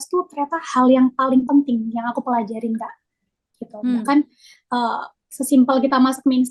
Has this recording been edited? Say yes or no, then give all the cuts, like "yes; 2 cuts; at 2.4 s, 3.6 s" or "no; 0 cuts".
no; 0 cuts